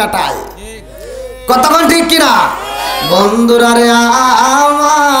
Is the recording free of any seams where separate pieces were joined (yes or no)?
yes